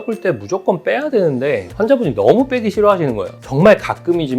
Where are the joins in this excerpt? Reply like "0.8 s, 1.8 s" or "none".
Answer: 3.3 s